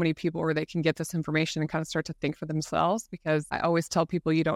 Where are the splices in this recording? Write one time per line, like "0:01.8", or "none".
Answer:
0:03.5